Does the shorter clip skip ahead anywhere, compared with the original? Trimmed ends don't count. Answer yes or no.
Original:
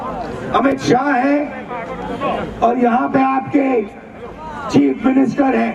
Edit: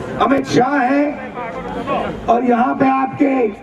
no